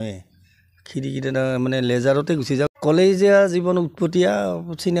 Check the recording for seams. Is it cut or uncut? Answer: cut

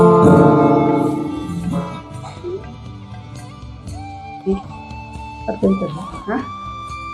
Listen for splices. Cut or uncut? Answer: uncut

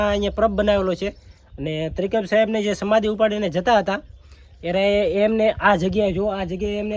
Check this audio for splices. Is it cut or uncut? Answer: uncut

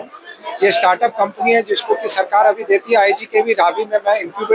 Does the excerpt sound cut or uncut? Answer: uncut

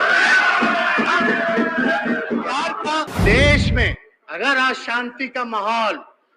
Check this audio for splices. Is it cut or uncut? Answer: cut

